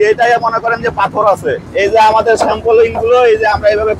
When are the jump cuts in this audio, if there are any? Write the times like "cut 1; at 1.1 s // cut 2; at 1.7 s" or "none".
cut 1; at 1.6 s